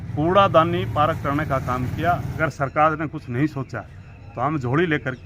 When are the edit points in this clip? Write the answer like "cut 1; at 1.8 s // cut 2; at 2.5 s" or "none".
cut 1; at 2.4 s